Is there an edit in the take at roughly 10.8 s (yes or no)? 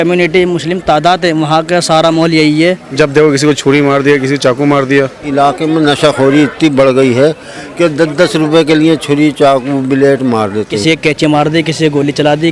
yes